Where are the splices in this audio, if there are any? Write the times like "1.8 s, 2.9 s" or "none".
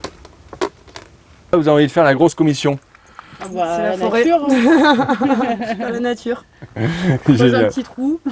1.5 s